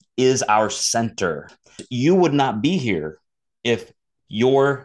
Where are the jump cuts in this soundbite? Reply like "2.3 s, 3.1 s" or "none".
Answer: 1.8 s

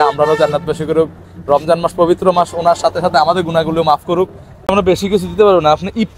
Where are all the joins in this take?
4.7 s

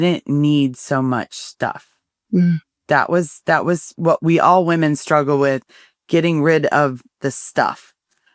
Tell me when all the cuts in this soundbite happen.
none

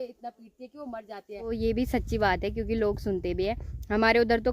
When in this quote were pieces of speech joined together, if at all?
1.5 s

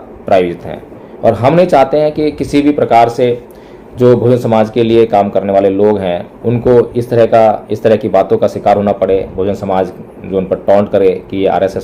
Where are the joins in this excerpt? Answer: none

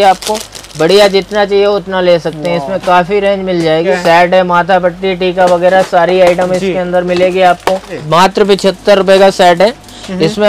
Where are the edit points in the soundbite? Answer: 3.9 s, 8.0 s

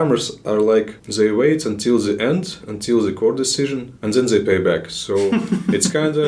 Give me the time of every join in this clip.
1.0 s, 3.9 s

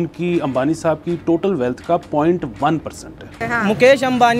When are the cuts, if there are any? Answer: 3.2 s

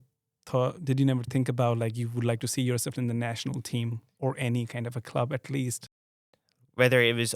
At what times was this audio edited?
6.3 s

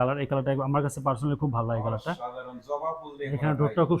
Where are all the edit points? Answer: none

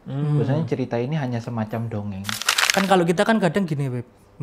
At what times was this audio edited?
2.5 s

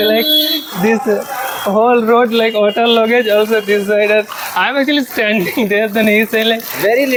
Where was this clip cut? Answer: none

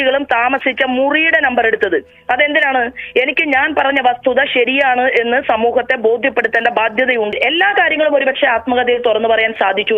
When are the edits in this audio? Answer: 7.3 s

